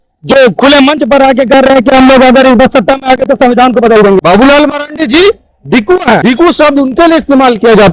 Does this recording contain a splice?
yes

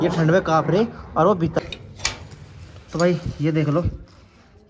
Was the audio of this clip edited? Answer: yes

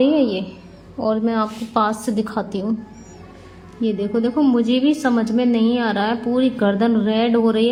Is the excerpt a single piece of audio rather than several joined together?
yes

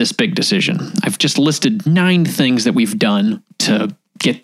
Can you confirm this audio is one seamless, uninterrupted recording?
no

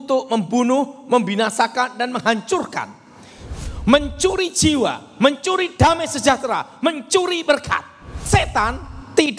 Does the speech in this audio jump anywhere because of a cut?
yes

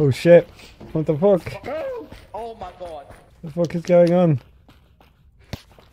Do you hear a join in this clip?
no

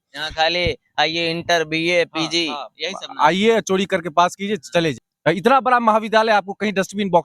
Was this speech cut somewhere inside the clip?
yes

